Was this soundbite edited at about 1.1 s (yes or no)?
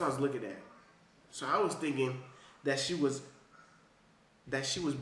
no